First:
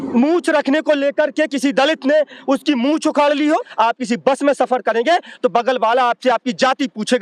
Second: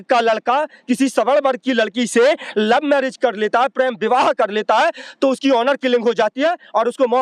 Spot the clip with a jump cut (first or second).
first